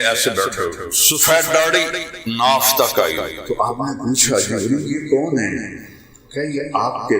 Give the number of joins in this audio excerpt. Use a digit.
2